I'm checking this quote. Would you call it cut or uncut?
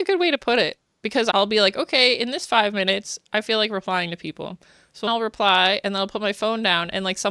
cut